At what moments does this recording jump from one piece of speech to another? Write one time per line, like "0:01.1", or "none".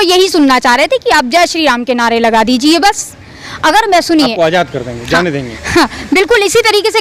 none